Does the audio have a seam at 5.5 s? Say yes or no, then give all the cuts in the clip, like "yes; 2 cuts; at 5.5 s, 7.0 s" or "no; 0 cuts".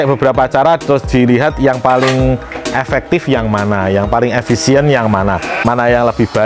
yes; 1 cut; at 5.5 s